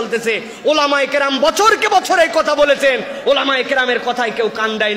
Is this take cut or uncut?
uncut